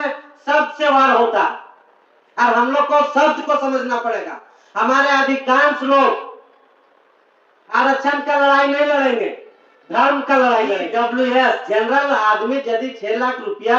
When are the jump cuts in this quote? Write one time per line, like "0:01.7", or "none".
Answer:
0:10.8